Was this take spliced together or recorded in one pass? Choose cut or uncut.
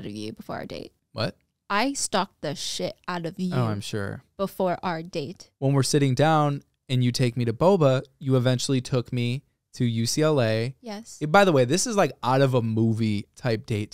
uncut